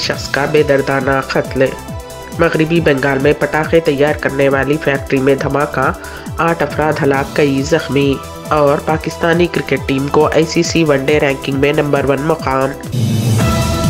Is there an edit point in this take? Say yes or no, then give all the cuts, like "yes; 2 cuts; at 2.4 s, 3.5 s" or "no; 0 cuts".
yes; 1 cut; at 12.9 s